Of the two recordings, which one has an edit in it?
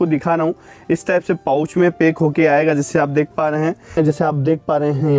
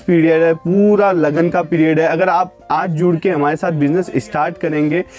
first; 1 cut; at 4.1 s

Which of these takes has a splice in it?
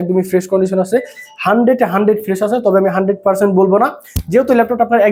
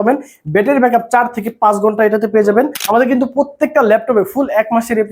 second; 1 cut; at 2.8 s

